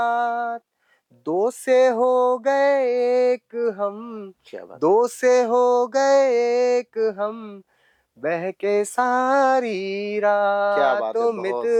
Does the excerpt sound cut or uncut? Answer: uncut